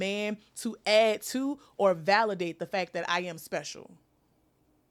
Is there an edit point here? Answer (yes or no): no